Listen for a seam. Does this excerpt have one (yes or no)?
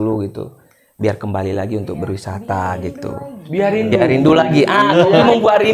no